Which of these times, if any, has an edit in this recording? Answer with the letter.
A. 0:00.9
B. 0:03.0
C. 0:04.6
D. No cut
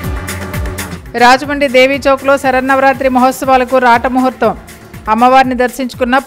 A